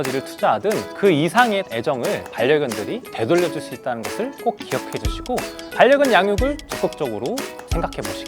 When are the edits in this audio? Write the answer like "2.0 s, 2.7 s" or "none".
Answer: 3.1 s